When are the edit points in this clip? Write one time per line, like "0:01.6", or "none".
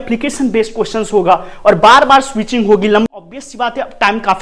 0:03.1